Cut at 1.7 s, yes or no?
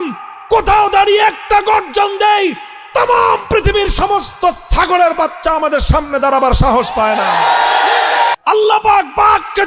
no